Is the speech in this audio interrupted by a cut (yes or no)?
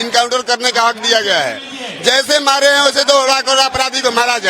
no